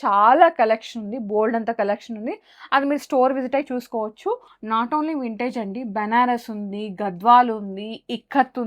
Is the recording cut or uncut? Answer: cut